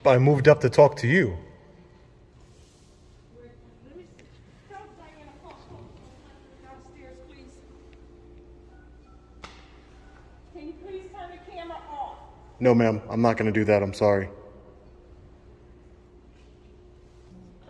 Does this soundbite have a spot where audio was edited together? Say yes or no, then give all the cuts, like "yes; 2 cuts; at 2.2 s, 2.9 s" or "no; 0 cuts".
no; 0 cuts